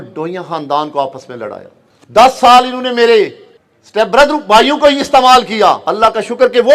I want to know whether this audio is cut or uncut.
cut